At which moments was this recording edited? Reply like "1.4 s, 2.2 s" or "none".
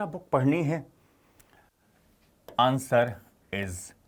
none